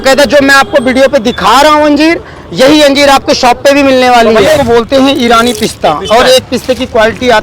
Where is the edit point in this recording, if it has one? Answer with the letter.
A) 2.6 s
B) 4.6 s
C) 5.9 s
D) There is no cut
B